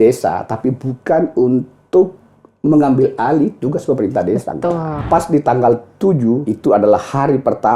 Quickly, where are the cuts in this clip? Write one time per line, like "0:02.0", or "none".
0:04.9
0:06.5